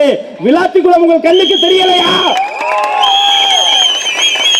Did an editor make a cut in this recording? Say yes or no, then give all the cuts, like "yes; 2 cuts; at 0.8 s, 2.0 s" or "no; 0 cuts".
no; 0 cuts